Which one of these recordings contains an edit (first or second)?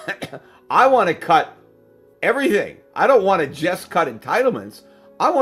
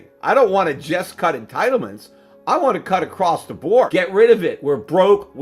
second